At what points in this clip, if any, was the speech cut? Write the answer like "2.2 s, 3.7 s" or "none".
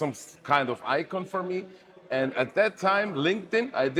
none